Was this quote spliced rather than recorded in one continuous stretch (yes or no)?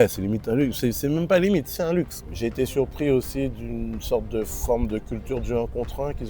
yes